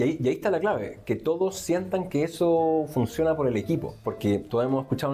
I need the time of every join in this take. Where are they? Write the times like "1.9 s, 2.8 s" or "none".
3.9 s